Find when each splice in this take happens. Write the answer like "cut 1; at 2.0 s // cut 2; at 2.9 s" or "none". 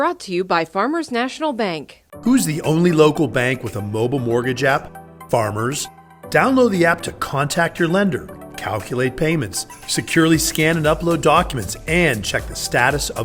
none